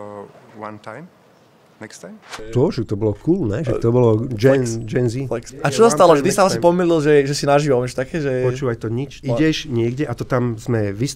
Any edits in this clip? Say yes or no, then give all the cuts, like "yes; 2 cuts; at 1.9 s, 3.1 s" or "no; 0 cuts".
yes; 3 cuts; at 2.5 s, 5.5 s, 9.2 s